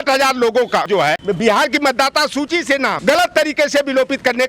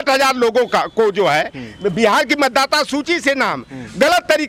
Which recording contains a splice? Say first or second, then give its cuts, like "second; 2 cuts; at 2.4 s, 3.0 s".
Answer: first; 2 cuts; at 0.9 s, 3.0 s